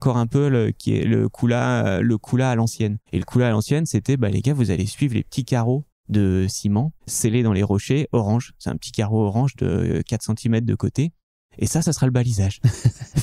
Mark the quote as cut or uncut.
cut